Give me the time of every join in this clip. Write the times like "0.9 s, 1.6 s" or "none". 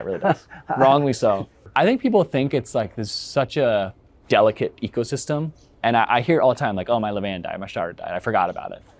1.5 s